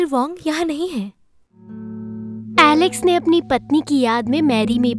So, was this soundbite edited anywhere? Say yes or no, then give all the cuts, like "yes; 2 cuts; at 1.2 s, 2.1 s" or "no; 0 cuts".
yes; 1 cut; at 1.9 s